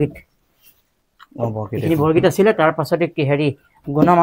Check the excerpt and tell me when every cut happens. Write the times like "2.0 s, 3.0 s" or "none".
none